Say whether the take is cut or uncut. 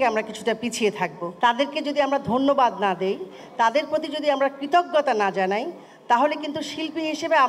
cut